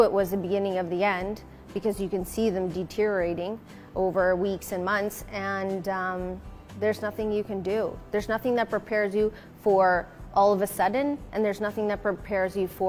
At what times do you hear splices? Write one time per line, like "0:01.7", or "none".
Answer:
none